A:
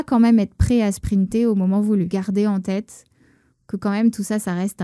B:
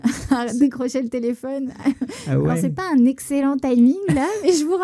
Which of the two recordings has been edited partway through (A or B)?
A